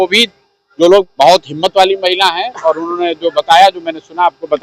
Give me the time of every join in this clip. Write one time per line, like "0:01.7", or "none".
0:01.0